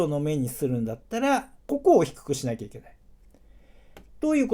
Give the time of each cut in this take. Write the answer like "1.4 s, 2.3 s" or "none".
1.6 s